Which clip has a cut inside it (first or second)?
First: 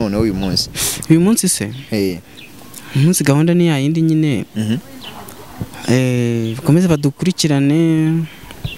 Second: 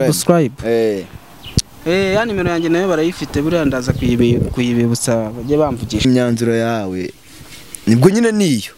second